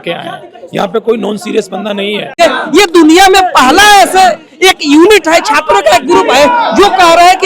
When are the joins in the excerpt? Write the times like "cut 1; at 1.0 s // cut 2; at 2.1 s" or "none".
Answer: cut 1; at 2.3 s

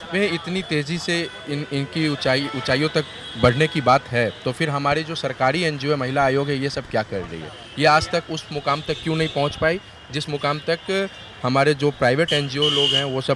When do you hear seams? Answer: none

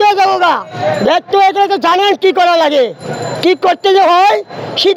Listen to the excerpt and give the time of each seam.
none

